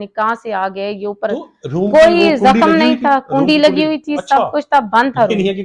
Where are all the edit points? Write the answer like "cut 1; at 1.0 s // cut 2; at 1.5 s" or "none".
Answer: none